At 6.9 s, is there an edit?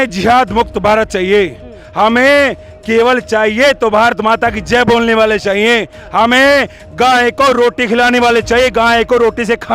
no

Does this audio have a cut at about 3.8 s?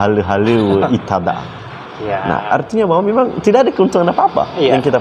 no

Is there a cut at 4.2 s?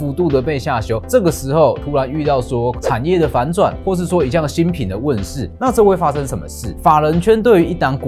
no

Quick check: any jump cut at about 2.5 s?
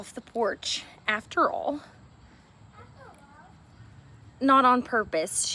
no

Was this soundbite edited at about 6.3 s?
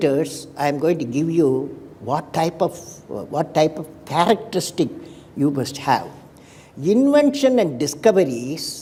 no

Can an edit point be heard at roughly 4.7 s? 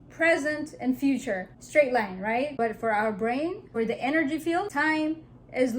yes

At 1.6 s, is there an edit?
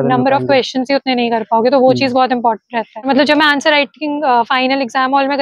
no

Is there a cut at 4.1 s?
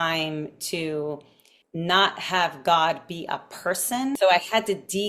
yes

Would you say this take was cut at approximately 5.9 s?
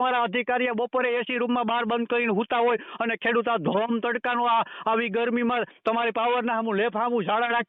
no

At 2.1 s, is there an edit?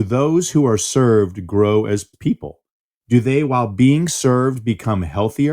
yes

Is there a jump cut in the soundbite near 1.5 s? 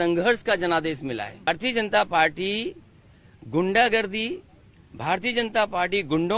yes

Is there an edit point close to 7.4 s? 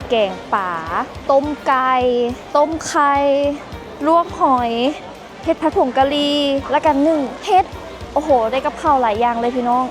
yes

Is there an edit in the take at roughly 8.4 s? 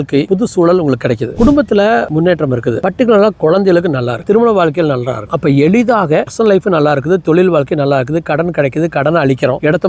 no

